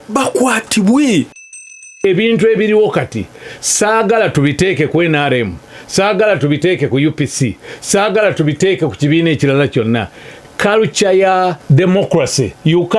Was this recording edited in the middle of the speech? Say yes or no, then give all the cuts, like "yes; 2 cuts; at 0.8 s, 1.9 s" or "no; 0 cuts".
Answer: yes; 2 cuts; at 1.8 s, 11.6 s